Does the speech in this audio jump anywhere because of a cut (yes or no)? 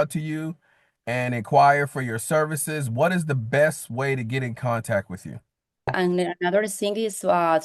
yes